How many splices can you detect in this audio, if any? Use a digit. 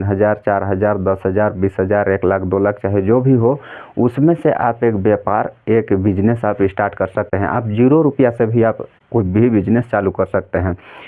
2